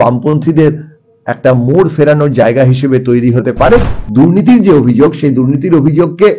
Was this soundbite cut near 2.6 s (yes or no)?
no